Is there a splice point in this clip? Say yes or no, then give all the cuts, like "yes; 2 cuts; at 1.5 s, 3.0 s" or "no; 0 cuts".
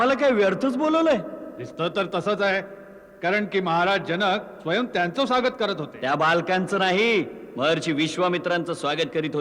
no; 0 cuts